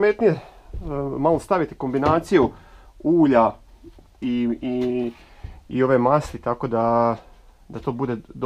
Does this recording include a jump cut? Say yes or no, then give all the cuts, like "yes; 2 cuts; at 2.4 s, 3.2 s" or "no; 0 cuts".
no; 0 cuts